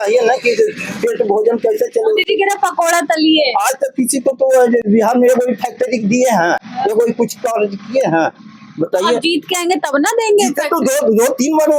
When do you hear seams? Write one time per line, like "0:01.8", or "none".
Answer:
none

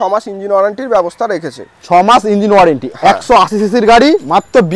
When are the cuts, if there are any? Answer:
none

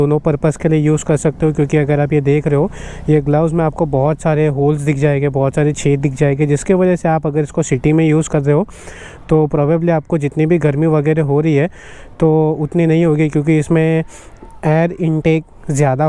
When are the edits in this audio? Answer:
none

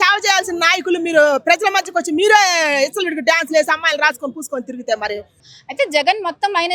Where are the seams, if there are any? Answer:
0:05.5

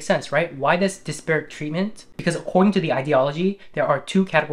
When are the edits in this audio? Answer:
0:02.1

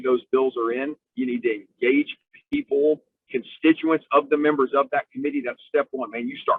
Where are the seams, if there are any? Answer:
none

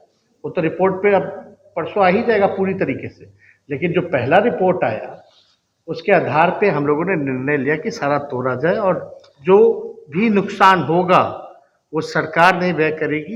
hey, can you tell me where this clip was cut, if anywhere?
none

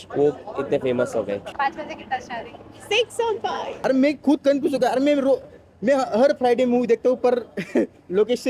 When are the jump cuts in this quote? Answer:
0:01.5
0:03.6

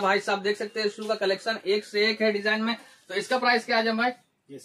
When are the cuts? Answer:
none

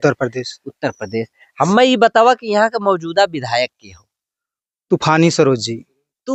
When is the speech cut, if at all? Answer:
none

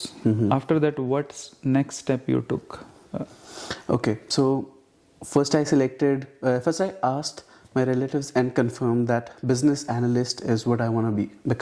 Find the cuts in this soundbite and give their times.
none

